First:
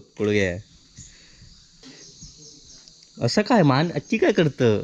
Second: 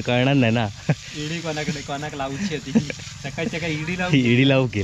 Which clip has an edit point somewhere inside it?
first; 1 cut; at 1.7 s

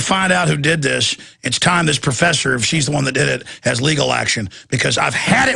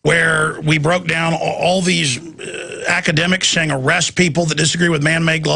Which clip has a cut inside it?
first; 1 cut; at 3.1 s

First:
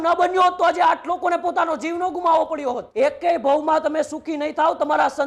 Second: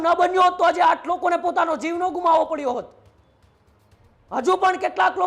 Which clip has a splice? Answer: first; 1 cut; at 2.9 s

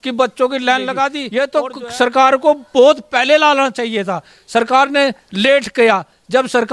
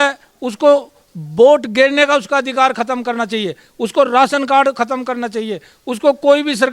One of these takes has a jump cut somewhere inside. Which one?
first; 1 cut; at 1.2 s

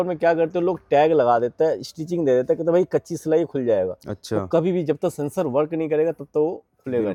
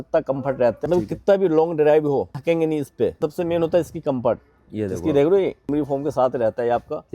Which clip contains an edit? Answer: second; 4 cuts; at 0.9 s, 2.3 s, 3.2 s, 5.7 s

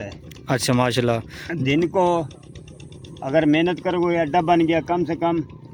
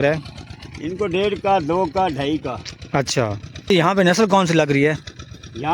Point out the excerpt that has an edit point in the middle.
second; 1 cut; at 3.7 s

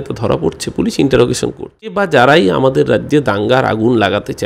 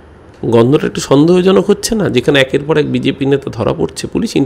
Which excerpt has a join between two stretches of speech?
first; 1 cut; at 2.0 s

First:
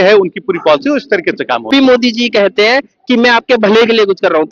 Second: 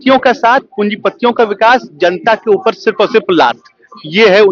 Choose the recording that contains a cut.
first; 1 cut; at 1.7 s

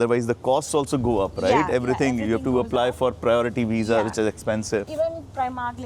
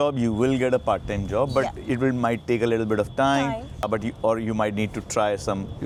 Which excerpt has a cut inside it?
first; 1 cut; at 4.9 s

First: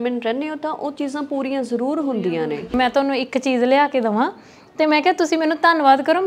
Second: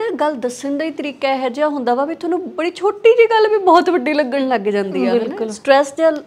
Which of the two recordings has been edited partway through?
first; 1 cut; at 2.7 s

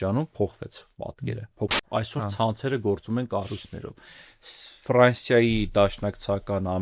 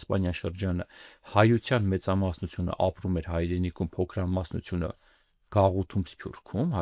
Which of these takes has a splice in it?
first; 1 cut; at 1.7 s

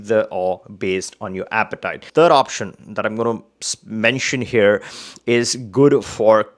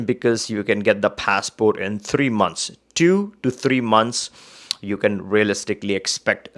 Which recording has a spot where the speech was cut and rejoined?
first; 1 cut; at 2.0 s

